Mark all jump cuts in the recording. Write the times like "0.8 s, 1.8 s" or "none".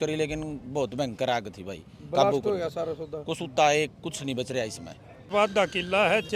5.3 s